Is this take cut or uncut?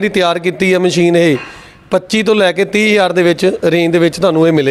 uncut